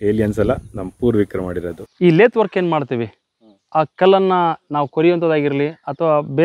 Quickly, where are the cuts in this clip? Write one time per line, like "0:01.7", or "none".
0:01.8